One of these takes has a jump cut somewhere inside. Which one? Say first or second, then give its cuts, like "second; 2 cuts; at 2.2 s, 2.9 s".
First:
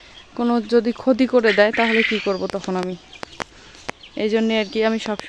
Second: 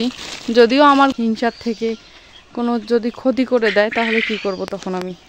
second; 1 cut; at 1.1 s